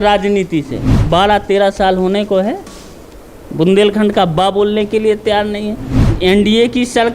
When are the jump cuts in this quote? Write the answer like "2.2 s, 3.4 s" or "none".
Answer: 0.9 s, 6.0 s